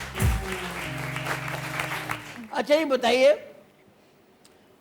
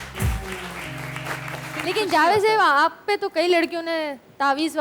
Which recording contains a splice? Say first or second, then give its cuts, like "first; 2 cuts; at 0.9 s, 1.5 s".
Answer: second; 1 cut; at 1.7 s